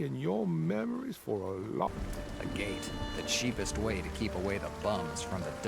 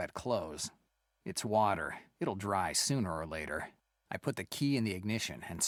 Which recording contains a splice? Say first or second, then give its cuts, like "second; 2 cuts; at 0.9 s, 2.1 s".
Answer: first; 1 cut; at 1.9 s